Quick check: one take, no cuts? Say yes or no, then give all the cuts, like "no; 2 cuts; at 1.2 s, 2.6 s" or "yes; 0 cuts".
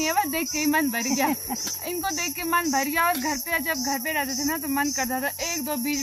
yes; 0 cuts